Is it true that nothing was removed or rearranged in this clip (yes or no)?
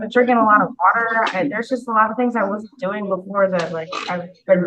yes